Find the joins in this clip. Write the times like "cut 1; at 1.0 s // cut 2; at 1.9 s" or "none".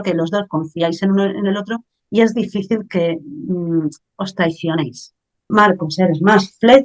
cut 1; at 5.5 s